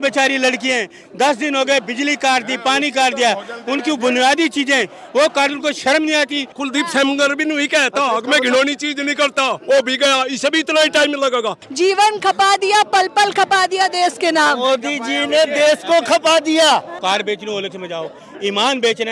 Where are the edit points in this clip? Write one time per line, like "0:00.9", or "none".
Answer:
0:06.5
0:11.6
0:16.9